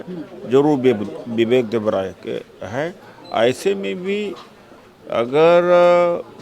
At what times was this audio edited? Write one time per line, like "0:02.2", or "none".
none